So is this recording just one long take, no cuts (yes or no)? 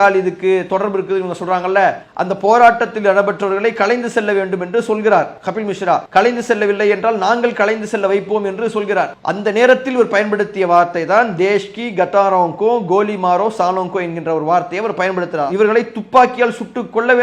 yes